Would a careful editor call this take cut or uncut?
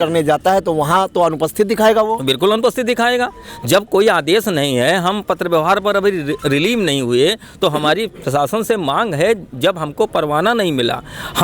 uncut